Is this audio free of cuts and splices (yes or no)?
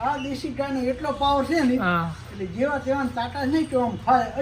yes